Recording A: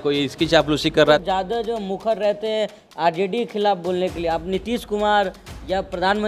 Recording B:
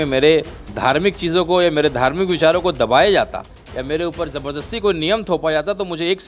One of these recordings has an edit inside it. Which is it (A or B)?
A